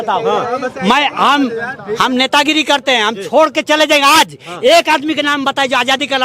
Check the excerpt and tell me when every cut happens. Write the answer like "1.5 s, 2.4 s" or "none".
none